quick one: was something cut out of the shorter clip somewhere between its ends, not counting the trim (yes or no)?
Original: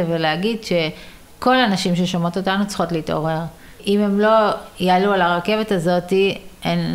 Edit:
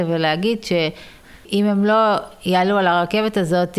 yes